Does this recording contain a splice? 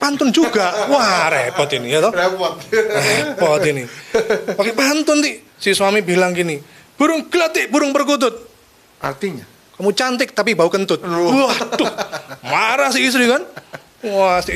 no; 0 cuts

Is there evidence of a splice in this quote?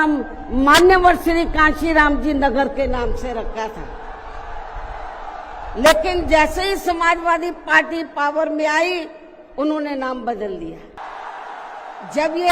yes; 1 cut; at 11.0 s

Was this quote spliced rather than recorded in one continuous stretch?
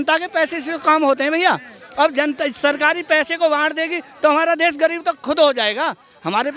no; 0 cuts

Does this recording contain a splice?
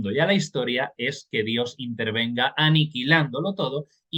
no; 0 cuts

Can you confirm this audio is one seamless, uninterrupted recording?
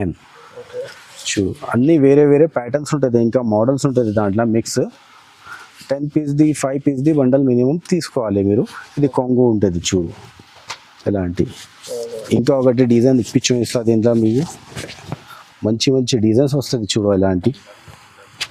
yes; 0 cuts

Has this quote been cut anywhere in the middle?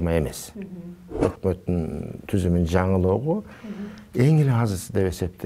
yes; 1 cut; at 1.1 s

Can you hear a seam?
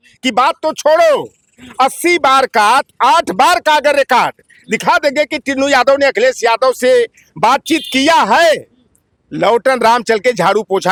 no; 0 cuts

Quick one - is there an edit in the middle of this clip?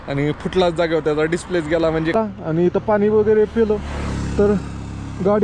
yes; 1 cut; at 2.1 s

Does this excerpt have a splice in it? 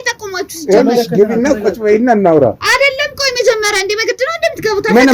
no; 0 cuts

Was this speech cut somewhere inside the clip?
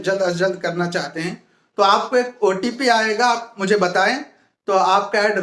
no; 0 cuts

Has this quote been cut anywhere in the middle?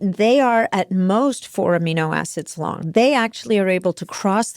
yes; 1 cut; at 2.9 s

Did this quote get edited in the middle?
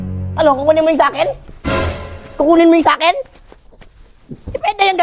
no; 0 cuts

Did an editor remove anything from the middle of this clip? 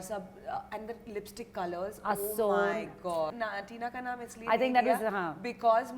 yes; 1 cut; at 3.4 s

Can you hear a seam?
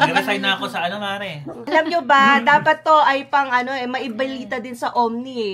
yes; 1 cut; at 1.7 s

